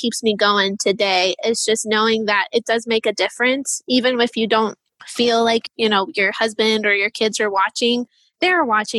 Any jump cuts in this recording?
no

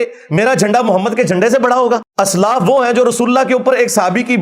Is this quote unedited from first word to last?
no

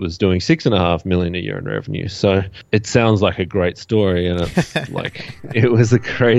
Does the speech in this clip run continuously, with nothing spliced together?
no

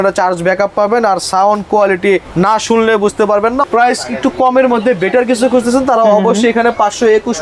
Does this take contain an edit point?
yes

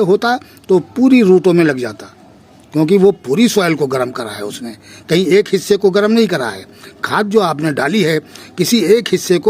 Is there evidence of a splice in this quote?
no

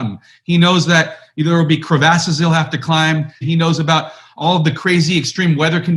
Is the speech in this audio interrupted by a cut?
yes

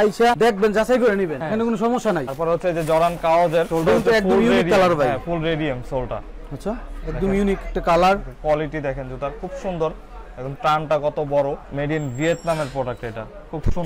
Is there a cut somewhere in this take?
no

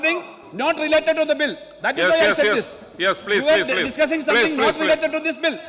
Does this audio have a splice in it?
no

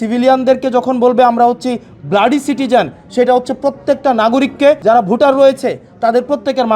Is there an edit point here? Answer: yes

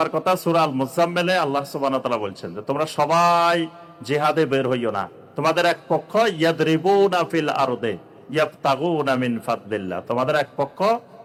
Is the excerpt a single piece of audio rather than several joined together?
yes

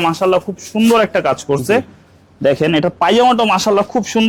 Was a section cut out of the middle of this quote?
no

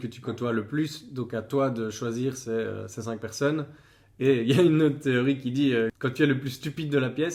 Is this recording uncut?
yes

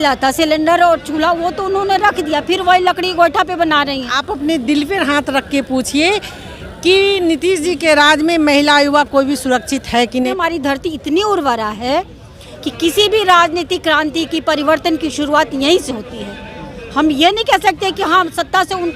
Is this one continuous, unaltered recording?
no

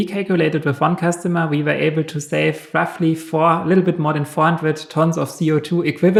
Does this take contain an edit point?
no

